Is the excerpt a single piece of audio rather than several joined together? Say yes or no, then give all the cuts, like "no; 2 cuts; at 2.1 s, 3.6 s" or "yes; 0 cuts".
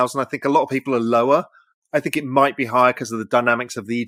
yes; 0 cuts